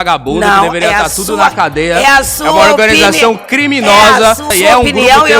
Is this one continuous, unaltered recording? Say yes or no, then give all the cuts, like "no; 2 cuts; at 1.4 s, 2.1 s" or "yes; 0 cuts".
no; 1 cut; at 4.5 s